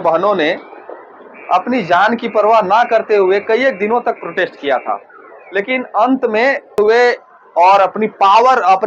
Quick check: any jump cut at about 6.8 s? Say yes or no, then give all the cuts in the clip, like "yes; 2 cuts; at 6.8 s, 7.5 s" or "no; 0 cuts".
yes; 1 cut; at 6.8 s